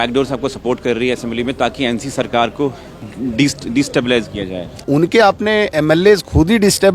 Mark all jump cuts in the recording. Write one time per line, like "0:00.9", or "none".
0:04.8